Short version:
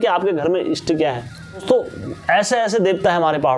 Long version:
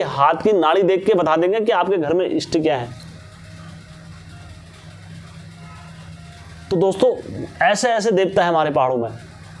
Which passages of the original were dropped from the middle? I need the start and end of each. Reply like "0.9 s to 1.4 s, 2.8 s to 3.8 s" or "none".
3.3 s to 6.9 s